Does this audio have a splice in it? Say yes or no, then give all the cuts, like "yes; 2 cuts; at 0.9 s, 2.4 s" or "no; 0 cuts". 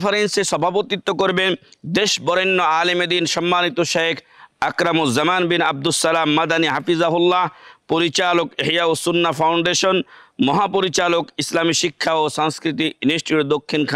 no; 0 cuts